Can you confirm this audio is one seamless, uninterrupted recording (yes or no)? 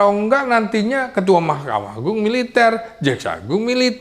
yes